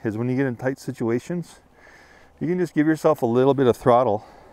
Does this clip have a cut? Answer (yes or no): no